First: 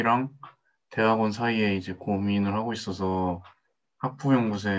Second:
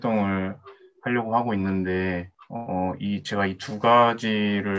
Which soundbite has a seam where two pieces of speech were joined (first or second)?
second